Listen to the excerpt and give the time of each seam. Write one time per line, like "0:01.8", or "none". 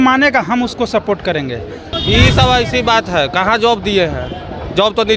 0:01.9